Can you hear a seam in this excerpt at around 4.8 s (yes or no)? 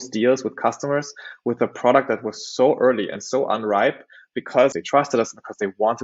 yes